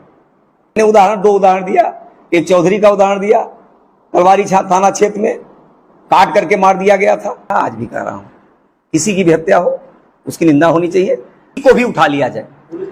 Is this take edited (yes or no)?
yes